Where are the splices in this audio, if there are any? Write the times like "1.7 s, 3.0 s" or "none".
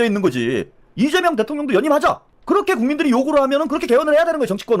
none